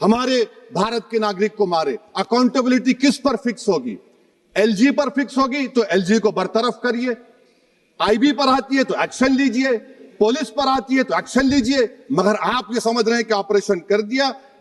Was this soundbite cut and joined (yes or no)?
no